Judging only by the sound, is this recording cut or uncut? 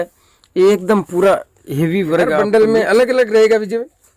cut